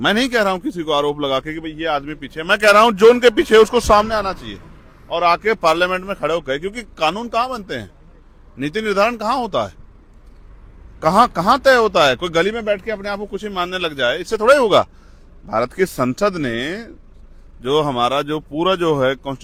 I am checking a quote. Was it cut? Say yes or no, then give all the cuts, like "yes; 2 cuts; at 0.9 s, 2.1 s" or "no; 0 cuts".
no; 0 cuts